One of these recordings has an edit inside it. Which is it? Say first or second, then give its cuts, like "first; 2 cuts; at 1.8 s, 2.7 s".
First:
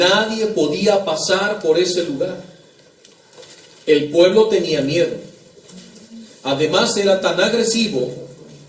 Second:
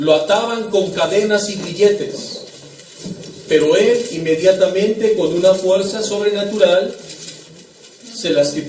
second; 1 cut; at 5.6 s